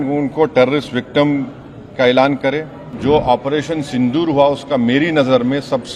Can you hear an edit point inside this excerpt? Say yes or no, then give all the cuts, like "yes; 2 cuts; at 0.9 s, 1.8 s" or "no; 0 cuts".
yes; 1 cut; at 2.9 s